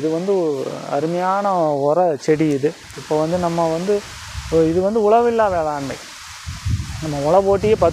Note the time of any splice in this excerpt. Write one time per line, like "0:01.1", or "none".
0:02.9